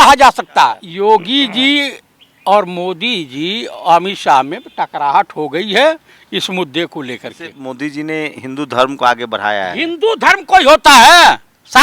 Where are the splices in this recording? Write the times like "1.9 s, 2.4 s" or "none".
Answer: 0.9 s, 7.6 s